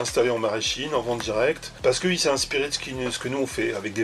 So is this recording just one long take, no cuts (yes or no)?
no